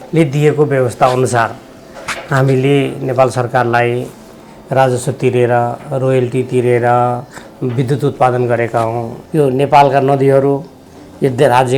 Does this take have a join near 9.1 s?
yes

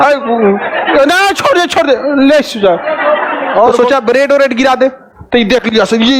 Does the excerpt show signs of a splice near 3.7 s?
yes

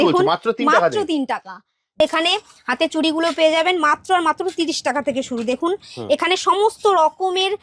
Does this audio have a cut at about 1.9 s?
yes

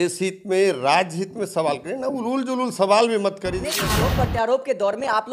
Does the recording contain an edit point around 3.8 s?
yes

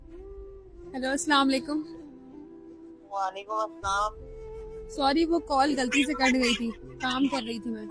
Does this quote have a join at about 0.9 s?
yes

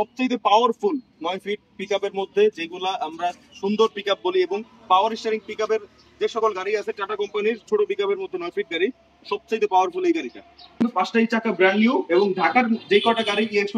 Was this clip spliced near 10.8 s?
yes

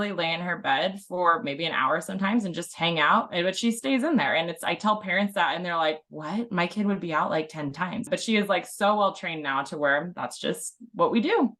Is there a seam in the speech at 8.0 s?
yes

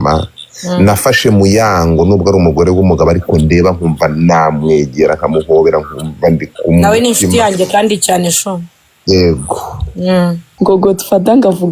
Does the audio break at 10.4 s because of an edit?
yes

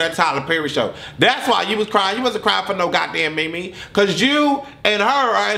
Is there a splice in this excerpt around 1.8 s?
no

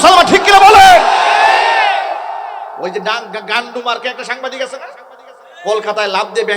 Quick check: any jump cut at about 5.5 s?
no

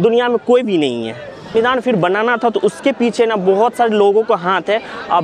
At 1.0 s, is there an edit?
no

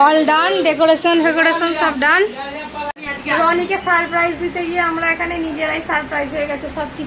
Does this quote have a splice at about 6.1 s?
no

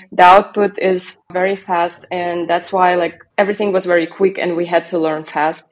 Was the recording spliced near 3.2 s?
yes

